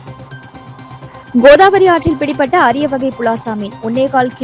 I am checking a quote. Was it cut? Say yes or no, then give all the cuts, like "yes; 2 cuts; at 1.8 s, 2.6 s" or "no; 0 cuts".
yes; 1 cut; at 0.9 s